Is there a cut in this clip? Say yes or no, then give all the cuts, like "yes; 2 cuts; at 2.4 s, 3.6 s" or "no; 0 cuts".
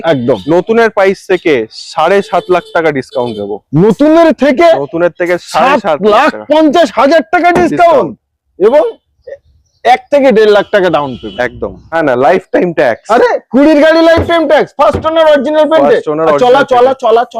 yes; 1 cut; at 11.9 s